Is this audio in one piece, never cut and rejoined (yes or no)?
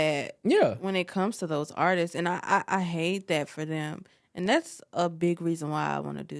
yes